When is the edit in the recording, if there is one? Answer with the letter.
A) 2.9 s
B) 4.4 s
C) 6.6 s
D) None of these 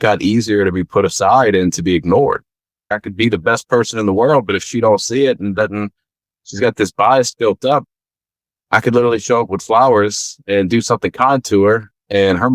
A